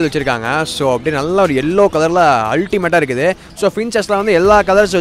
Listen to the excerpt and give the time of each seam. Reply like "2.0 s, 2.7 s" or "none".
3.5 s